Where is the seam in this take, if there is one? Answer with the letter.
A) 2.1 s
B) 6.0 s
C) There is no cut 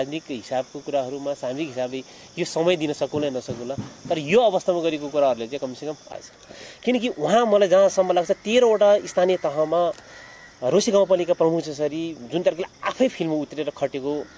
B